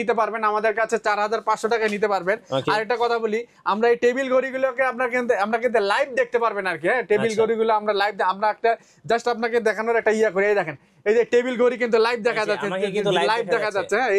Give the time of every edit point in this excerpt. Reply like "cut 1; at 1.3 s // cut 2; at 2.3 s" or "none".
none